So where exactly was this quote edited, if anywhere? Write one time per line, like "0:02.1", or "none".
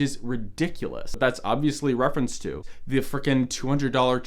0:01.2
0:02.7